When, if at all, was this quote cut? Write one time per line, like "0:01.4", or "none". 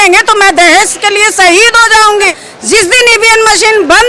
0:02.3